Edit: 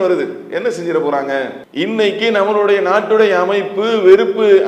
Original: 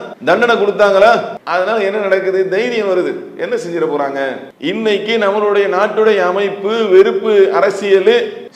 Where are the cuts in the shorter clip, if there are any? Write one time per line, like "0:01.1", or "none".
none